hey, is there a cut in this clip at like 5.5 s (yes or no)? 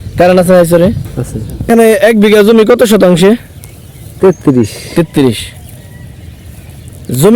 no